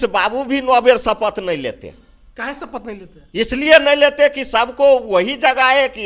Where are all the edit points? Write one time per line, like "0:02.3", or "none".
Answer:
none